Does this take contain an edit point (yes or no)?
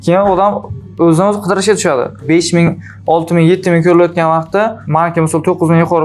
yes